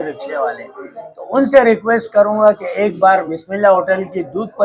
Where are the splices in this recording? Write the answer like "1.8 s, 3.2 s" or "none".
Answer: none